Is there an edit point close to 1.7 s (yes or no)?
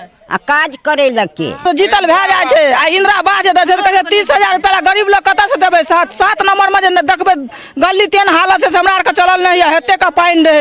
yes